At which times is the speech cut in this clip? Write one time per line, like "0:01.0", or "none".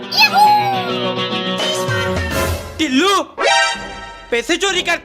none